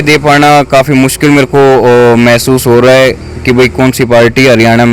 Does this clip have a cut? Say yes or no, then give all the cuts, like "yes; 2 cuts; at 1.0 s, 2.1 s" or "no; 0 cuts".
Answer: no; 0 cuts